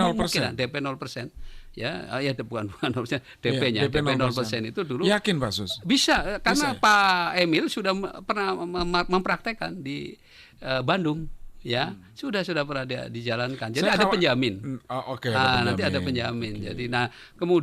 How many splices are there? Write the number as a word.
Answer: zero